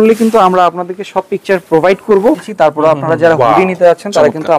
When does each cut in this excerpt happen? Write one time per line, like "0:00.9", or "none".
0:02.5